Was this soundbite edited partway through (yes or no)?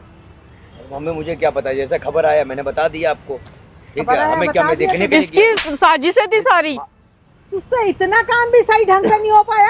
no